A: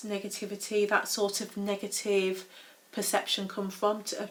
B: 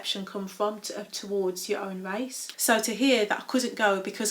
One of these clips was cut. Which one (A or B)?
B